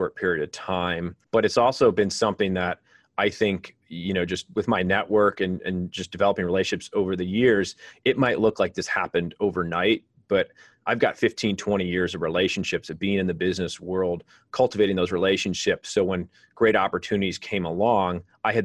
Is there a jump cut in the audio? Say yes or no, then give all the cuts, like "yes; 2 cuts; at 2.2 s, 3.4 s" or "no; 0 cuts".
yes; 1 cut; at 1.2 s